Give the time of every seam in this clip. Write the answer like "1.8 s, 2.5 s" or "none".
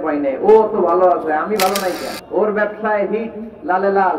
2.1 s